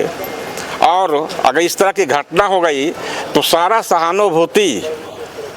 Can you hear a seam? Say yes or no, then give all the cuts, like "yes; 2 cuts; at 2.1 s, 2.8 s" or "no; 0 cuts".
no; 0 cuts